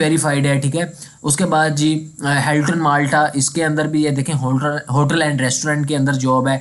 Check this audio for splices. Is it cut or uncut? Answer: uncut